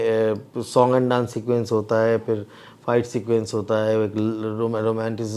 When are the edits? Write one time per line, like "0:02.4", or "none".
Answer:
none